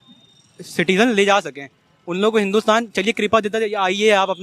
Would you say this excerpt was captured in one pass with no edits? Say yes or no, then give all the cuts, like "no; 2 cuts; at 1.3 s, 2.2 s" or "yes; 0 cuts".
yes; 0 cuts